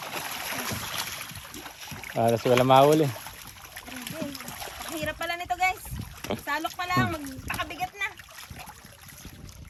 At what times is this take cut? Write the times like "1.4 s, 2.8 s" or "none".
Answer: none